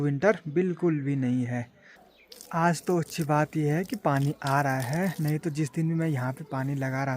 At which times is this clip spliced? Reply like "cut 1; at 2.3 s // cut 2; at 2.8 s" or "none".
cut 1; at 2.1 s